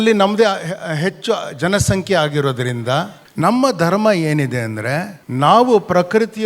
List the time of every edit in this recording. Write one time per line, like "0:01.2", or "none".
0:03.2
0:05.2